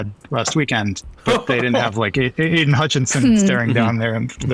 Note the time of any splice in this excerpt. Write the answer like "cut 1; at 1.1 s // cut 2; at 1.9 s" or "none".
cut 1; at 1.1 s